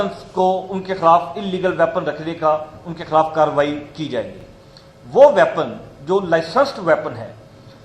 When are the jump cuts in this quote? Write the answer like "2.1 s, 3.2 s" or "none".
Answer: none